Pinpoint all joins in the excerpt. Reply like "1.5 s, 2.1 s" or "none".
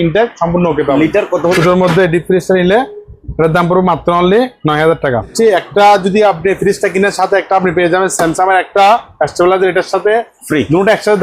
1.5 s, 5.3 s